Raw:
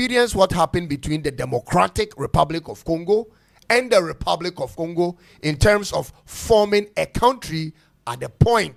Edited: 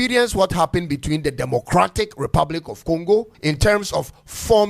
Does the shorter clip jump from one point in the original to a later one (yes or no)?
yes